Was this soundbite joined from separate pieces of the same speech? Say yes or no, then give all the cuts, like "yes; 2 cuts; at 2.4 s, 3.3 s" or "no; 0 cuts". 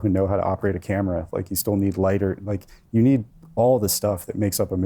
no; 0 cuts